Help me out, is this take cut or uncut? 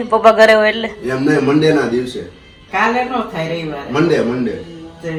uncut